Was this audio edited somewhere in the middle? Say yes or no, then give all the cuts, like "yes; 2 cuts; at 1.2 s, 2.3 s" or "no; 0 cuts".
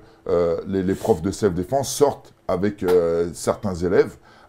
no; 0 cuts